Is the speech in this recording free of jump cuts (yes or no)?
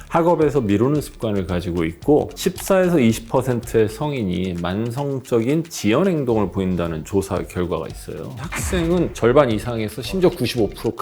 no